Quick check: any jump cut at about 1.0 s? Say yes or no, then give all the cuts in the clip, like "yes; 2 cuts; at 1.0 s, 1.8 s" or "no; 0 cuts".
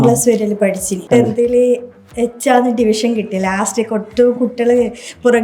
yes; 1 cut; at 1.0 s